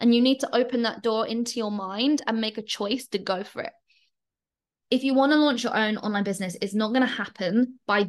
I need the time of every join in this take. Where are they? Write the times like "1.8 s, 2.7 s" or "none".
4.7 s